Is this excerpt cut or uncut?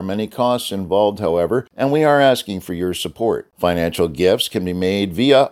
cut